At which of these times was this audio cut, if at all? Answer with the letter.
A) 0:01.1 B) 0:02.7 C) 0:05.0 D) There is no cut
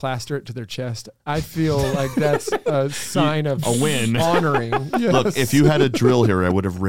A